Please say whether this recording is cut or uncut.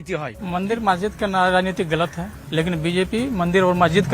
cut